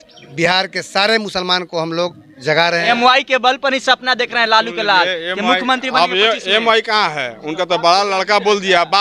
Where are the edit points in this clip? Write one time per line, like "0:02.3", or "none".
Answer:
0:02.8